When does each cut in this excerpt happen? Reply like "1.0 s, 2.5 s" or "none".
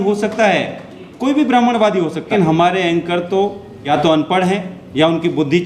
2.3 s, 3.7 s, 4.8 s

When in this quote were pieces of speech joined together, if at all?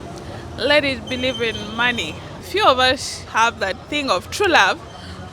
2.4 s

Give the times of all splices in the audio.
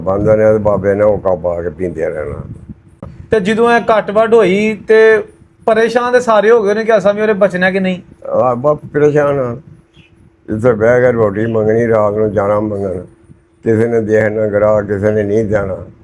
3.1 s

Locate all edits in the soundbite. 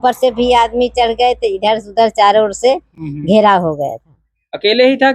none

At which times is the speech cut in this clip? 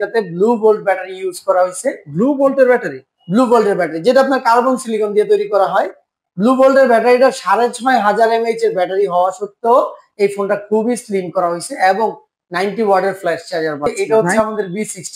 13.9 s

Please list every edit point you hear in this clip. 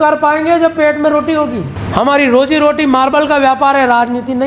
1.7 s

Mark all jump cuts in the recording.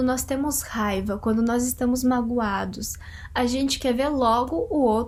none

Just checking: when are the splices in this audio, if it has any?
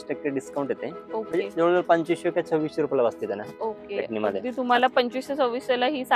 none

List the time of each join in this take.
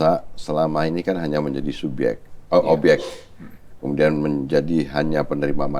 none

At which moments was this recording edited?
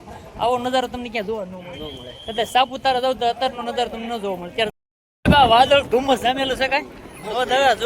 4.7 s

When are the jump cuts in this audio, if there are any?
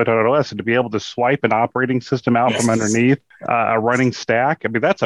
3.3 s

